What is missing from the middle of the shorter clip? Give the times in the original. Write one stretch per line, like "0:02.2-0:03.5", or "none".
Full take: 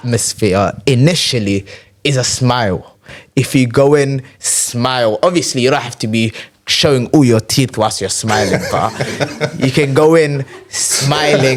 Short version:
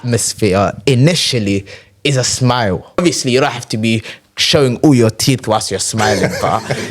0:03.0-0:05.3